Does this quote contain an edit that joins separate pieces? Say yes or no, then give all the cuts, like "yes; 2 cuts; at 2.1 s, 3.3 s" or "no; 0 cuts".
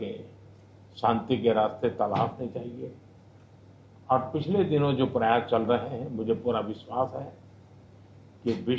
yes; 1 cut; at 5.9 s